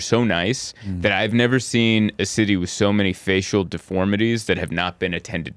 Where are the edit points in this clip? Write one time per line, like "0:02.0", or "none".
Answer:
none